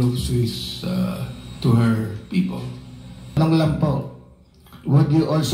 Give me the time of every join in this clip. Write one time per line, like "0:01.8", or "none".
0:03.4